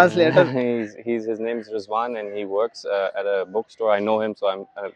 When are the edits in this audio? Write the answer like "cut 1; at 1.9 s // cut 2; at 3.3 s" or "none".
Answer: none